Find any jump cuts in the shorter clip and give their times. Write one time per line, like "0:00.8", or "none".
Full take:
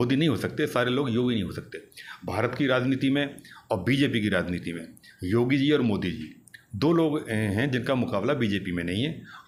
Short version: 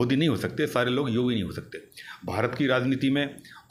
none